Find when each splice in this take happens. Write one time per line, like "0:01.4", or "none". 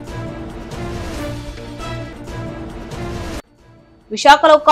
0:03.6